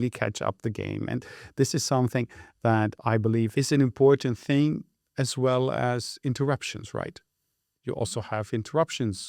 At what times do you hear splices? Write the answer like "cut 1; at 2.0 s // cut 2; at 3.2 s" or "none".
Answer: none

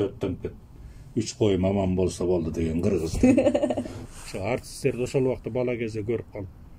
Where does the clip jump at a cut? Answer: cut 1; at 4.0 s

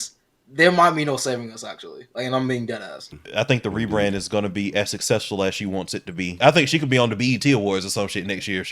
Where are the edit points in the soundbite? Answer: cut 1; at 3.1 s // cut 2; at 6.4 s

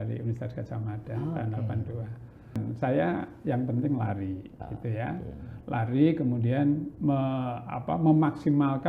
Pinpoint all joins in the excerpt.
cut 1; at 2.6 s

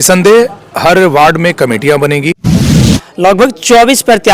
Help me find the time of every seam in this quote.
cut 1; at 2.8 s

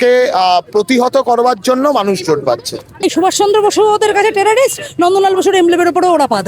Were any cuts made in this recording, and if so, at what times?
cut 1; at 3.0 s

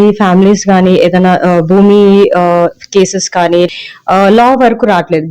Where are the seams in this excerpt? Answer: cut 1; at 3.7 s

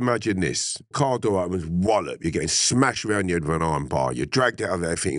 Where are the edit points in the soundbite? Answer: cut 1; at 0.9 s

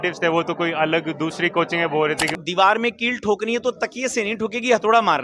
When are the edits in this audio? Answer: cut 1; at 2.4 s

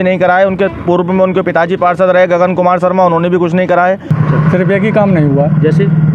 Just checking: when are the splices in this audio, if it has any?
cut 1; at 4.1 s

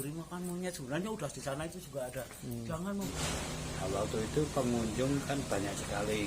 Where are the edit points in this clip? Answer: cut 1; at 3.1 s

